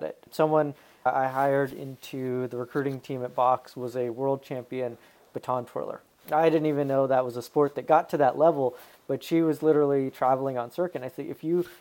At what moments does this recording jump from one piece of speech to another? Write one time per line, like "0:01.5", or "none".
0:01.1